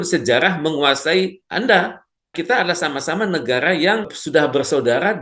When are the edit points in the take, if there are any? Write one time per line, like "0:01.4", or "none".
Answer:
0:02.4
0:04.2

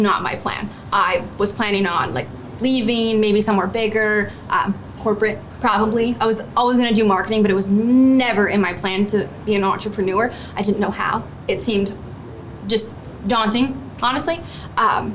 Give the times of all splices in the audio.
none

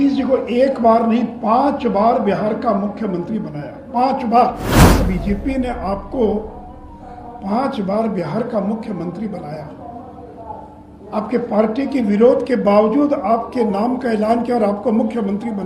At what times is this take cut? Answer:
0:05.0

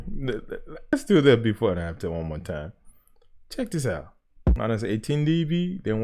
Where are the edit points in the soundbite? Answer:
0:00.9
0:04.6

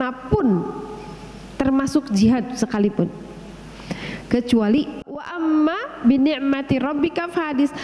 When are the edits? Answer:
0:05.2

